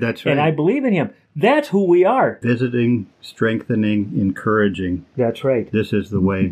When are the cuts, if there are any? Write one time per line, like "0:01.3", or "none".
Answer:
0:02.4